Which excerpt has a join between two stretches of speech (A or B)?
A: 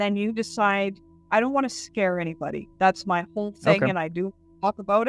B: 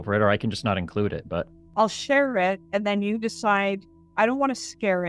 B